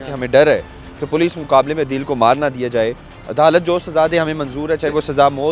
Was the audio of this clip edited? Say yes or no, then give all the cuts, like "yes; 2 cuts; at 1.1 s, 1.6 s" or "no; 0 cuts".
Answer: no; 0 cuts